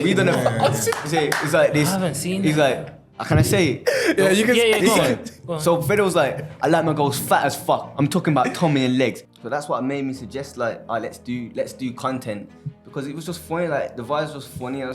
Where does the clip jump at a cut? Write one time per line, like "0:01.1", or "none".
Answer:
0:09.2